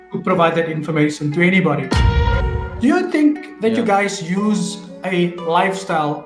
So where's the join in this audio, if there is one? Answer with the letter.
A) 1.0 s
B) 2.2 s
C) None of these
B